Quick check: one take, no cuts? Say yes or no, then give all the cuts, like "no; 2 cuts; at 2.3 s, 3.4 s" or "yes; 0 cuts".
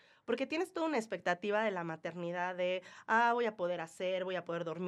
yes; 0 cuts